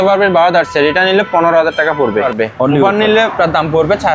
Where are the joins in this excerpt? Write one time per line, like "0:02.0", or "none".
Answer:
0:02.3